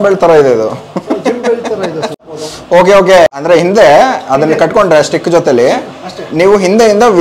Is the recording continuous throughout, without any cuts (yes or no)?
no